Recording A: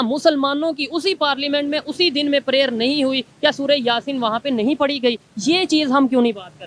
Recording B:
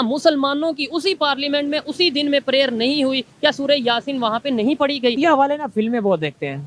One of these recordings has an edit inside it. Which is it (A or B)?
B